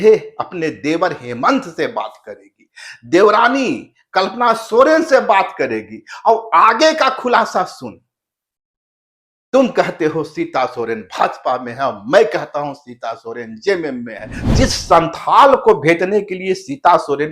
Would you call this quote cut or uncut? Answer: cut